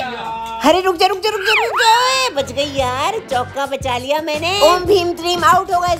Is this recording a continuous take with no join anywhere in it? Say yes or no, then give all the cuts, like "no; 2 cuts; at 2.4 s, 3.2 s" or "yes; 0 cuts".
yes; 0 cuts